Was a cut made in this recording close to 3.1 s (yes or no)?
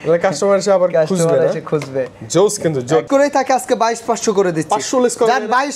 yes